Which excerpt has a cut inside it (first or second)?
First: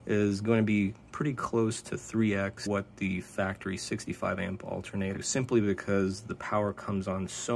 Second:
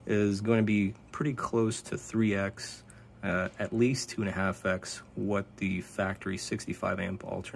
first